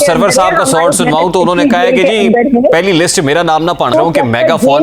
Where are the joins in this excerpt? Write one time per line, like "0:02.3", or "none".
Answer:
0:03.9